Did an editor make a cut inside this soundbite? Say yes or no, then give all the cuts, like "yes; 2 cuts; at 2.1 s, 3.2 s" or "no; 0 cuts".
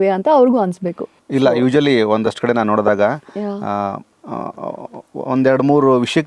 no; 0 cuts